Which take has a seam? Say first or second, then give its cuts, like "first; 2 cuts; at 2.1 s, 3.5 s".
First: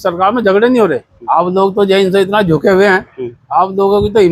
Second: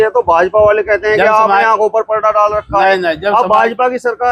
first; 1 cut; at 1.1 s